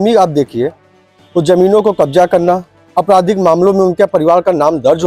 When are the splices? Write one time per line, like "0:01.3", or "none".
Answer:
none